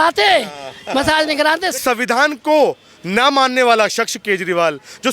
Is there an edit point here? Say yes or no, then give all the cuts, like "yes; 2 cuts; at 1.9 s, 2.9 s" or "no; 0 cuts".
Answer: yes; 1 cut; at 1.8 s